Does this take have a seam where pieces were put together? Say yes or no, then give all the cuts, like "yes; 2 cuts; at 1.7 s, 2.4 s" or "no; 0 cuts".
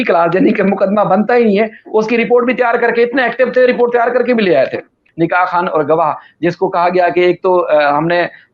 yes; 1 cut; at 5.0 s